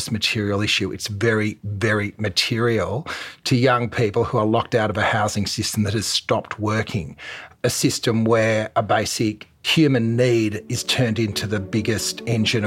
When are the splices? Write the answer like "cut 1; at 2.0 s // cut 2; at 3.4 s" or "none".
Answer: none